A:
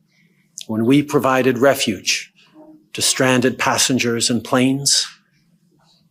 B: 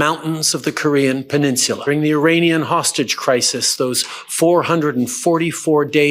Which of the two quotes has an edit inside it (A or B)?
B